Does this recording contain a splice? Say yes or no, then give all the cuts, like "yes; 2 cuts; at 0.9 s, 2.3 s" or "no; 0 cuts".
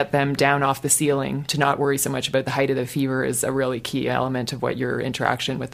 yes; 1 cut; at 1.4 s